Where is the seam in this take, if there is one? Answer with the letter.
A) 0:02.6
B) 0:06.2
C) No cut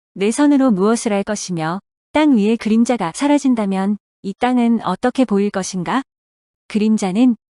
C